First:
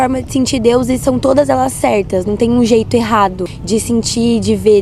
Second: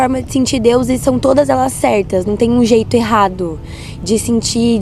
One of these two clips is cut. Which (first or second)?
first